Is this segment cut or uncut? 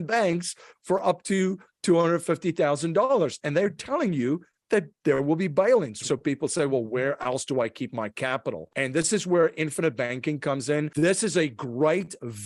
cut